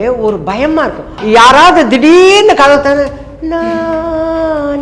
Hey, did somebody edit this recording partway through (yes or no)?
yes